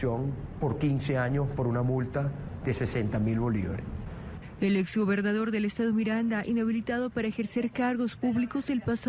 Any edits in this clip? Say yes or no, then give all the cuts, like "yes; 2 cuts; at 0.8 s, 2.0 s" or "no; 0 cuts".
yes; 1 cut; at 7.1 s